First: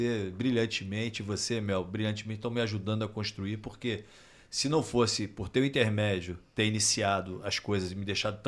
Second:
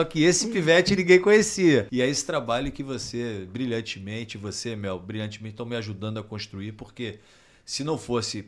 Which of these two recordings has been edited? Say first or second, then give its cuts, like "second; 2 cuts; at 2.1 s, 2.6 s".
second; 1 cut; at 1.9 s